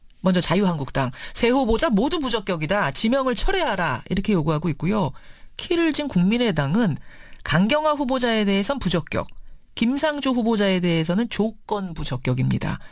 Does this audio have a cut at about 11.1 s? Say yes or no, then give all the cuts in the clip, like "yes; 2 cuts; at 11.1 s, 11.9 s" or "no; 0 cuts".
no; 0 cuts